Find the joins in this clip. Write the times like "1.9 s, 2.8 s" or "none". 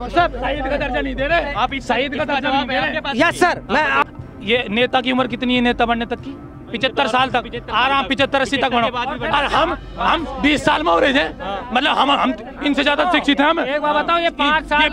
4.0 s